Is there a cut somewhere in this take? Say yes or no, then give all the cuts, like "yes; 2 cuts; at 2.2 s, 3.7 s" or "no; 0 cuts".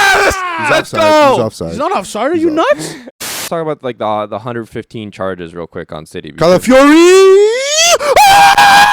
yes; 1 cut; at 3.4 s